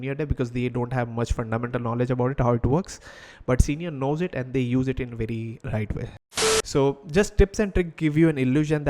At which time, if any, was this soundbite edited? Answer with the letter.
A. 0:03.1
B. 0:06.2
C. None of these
B